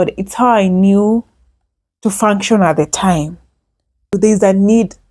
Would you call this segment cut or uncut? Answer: cut